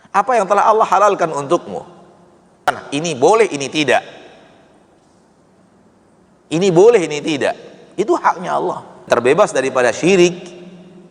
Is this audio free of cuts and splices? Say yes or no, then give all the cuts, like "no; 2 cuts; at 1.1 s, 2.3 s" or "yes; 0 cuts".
no; 2 cuts; at 2.7 s, 9.1 s